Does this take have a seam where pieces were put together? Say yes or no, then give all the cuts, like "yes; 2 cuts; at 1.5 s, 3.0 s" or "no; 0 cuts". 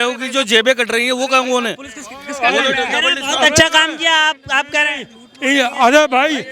no; 0 cuts